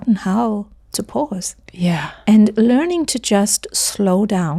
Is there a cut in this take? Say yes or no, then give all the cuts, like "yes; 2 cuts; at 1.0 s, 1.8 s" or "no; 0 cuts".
no; 0 cuts